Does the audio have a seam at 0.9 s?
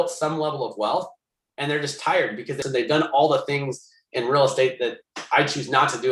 no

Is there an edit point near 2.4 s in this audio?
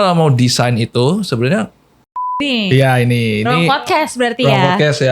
yes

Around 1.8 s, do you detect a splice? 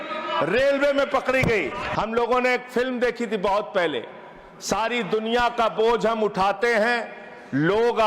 yes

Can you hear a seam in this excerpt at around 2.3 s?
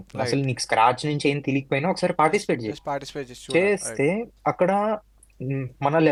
no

